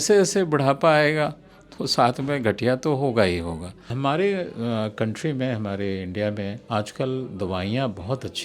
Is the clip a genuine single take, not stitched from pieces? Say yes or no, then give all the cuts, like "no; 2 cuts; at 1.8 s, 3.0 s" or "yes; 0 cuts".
no; 1 cut; at 4.0 s